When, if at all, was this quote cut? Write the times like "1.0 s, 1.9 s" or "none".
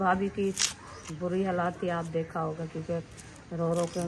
none